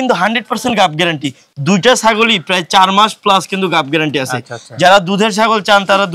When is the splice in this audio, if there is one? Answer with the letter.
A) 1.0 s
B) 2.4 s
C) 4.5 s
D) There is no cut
D